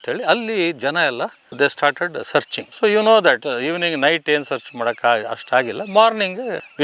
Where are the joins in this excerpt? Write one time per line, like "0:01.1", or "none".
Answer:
none